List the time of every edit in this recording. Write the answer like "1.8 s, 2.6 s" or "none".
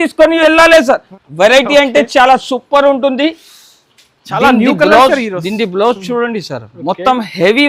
1.2 s